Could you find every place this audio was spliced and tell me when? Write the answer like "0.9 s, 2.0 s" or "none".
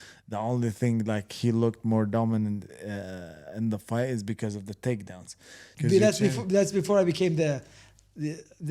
5.6 s